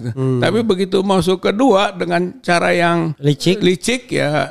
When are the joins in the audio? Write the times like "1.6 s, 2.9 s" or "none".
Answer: 3.1 s